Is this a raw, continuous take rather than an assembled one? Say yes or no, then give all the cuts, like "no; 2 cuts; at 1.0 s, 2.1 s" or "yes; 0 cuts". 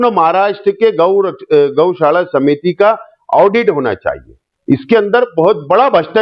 no; 1 cut; at 4.5 s